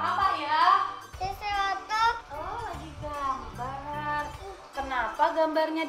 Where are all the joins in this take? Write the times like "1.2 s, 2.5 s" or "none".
1.0 s